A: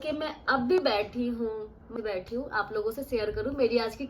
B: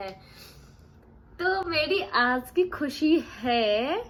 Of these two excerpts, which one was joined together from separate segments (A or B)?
A